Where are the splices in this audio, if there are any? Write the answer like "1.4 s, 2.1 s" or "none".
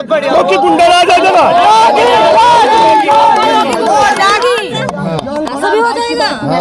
none

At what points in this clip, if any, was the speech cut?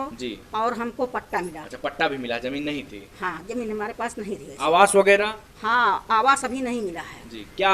none

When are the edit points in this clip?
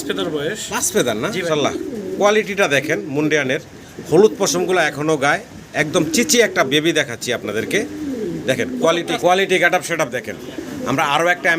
1.5 s, 9.1 s

